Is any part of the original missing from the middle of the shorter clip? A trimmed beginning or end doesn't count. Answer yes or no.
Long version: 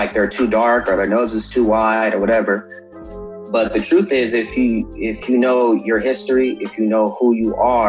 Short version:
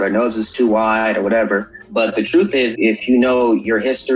yes